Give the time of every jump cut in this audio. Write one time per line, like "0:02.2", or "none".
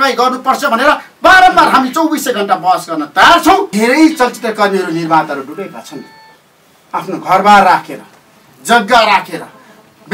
0:03.7